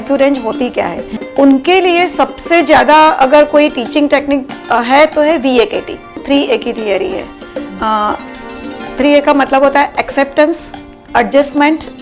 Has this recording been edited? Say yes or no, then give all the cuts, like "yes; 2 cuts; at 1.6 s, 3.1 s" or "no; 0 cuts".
yes; 2 cuts; at 1.2 s, 6.2 s